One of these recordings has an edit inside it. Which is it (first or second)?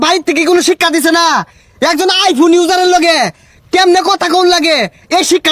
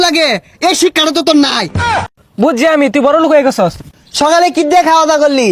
second